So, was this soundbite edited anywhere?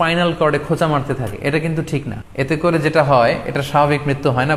yes; 1 cut; at 2.2 s

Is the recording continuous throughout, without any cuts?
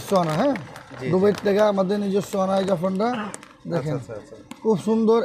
yes; 0 cuts

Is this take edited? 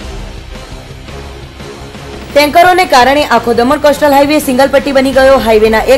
yes; 1 cut; at 2.3 s

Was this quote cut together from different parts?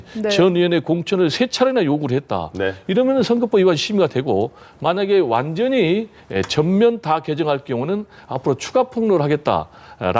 no; 0 cuts

